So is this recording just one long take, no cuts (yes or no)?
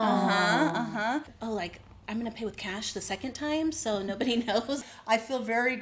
no